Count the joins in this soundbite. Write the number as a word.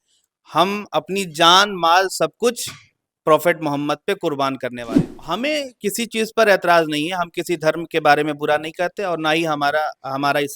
one